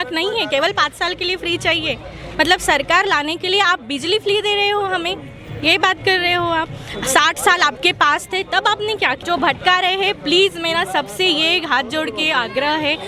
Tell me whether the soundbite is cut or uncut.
cut